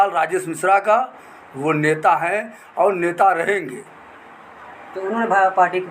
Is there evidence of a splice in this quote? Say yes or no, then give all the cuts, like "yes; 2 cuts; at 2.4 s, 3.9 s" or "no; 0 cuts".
no; 0 cuts